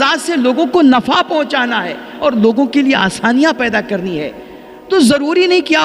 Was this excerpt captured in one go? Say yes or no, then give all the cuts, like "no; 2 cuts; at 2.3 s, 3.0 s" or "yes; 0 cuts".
yes; 0 cuts